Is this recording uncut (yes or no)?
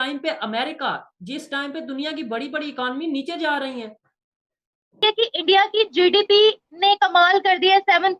no